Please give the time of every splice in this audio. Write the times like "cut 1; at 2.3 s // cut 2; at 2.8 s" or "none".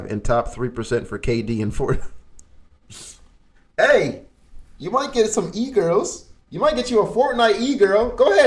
none